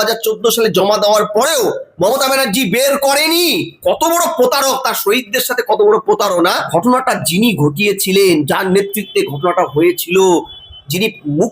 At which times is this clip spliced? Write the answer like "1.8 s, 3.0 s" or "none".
6.6 s